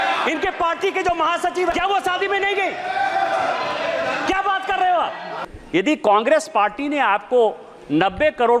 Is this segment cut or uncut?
cut